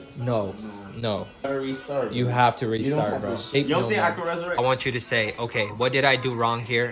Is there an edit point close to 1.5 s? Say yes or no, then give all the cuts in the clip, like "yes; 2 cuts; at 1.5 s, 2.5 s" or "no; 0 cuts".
yes; 3 cuts; at 1.5 s, 3.5 s, 4.6 s